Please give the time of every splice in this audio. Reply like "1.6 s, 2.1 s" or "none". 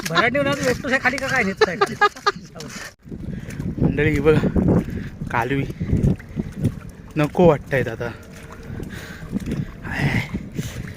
2.9 s

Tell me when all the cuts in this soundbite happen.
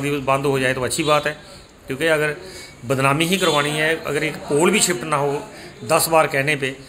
none

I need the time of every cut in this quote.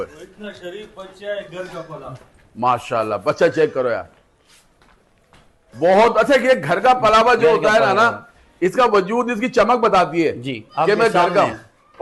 none

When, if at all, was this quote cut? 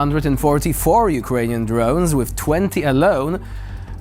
none

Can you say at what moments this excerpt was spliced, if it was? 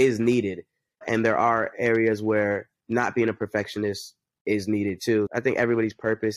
5.3 s

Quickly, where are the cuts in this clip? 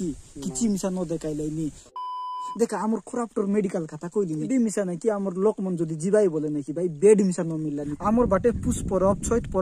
2.0 s, 4.5 s, 7.9 s

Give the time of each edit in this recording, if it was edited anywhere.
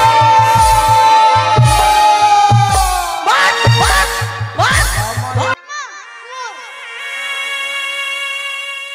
5.5 s

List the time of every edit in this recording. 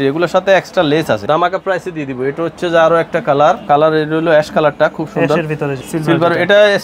1.2 s, 3.6 s, 5.8 s

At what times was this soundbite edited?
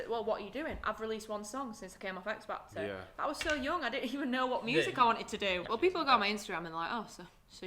5.6 s

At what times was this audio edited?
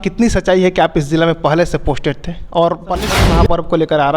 3.1 s

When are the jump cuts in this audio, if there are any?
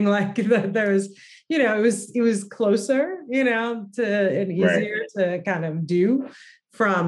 none

